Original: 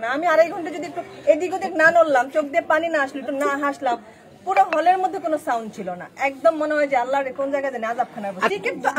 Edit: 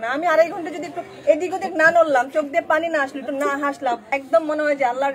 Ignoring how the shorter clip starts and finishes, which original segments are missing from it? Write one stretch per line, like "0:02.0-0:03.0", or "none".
0:04.1-0:06.2